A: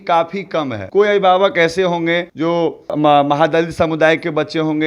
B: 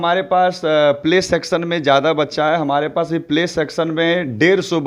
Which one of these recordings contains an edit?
A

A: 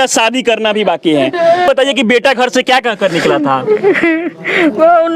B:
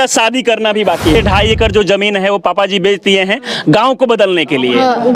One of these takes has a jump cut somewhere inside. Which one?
B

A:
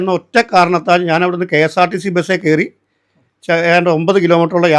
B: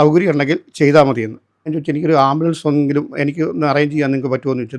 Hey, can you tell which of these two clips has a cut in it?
B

